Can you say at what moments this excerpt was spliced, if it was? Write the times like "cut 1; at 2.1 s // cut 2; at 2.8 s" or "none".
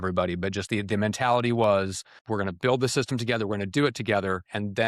cut 1; at 2.1 s